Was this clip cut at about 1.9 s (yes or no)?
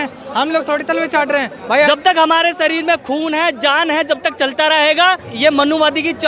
yes